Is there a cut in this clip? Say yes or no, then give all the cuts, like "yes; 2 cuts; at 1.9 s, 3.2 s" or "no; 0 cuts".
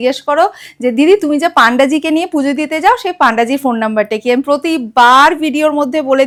no; 0 cuts